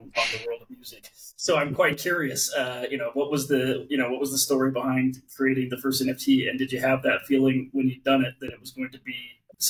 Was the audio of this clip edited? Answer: no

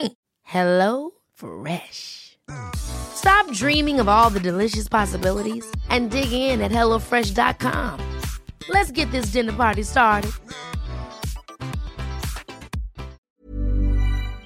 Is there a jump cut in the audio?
yes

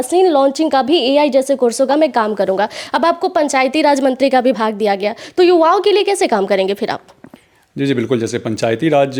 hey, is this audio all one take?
yes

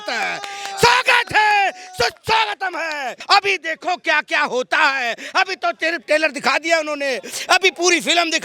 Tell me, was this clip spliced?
yes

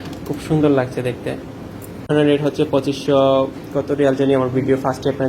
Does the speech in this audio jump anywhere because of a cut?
yes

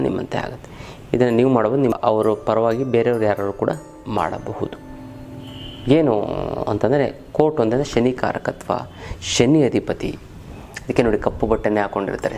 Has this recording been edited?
yes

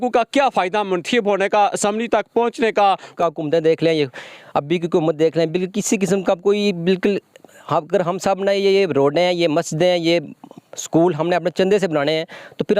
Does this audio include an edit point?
yes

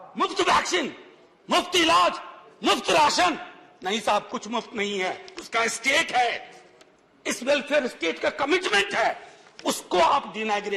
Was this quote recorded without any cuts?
yes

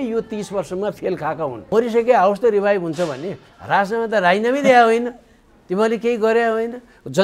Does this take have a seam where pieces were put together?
yes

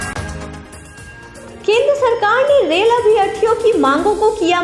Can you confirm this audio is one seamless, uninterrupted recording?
no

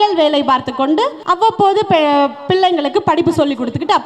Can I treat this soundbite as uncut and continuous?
no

